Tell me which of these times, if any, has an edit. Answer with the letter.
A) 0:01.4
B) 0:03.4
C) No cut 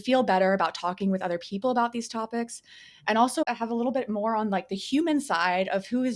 B